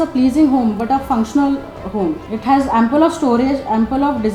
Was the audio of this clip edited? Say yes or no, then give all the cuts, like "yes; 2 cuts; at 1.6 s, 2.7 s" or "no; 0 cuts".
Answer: yes; 1 cut; at 2.3 s